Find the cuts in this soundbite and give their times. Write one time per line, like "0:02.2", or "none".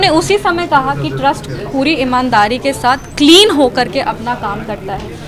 none